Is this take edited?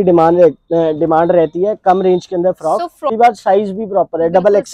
yes; 1 cut; at 3.1 s

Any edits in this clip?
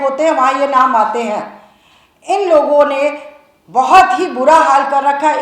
no; 0 cuts

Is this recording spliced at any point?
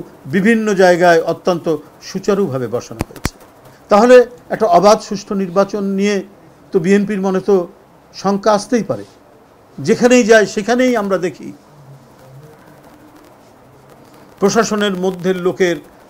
no; 0 cuts

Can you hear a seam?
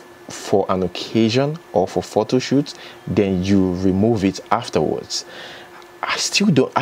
no; 0 cuts

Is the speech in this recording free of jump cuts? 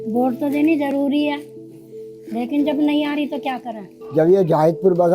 no; 1 cut; at 3.9 s

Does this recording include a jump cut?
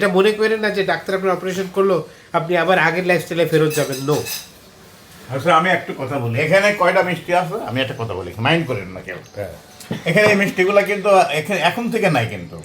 no; 0 cuts

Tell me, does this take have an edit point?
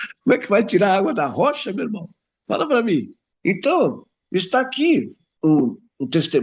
yes; 2 cuts; at 3.2 s, 5.2 s

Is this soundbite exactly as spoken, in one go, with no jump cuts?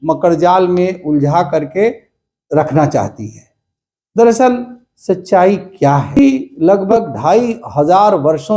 no; 1 cut; at 6.2 s

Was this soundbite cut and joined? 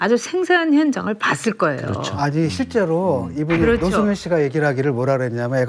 no; 0 cuts

